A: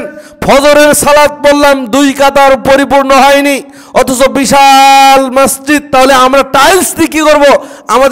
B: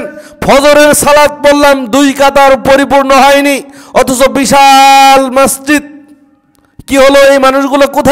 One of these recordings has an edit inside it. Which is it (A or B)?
A